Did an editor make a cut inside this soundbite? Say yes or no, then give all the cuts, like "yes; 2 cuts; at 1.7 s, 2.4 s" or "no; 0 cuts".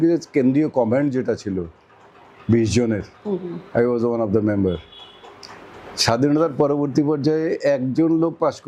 no; 0 cuts